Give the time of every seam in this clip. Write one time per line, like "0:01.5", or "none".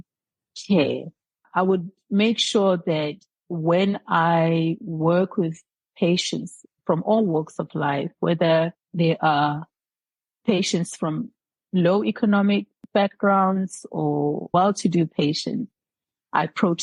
0:12.8